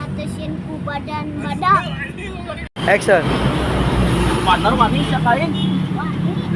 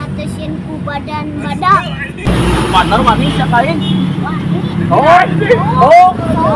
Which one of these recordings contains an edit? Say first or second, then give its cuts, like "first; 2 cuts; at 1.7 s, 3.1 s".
second; 1 cut; at 2.3 s